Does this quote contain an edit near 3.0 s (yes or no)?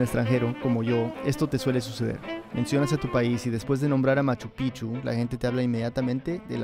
yes